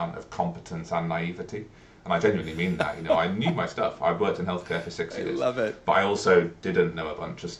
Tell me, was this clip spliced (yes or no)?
no